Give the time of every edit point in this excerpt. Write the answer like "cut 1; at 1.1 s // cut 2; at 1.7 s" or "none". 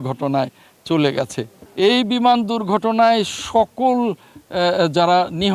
cut 1; at 1.6 s